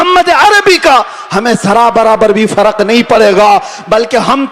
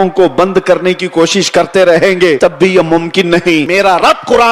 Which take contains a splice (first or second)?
second